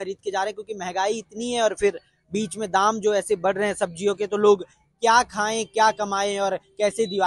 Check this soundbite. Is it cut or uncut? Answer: uncut